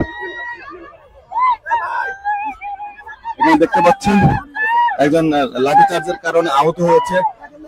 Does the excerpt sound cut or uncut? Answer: uncut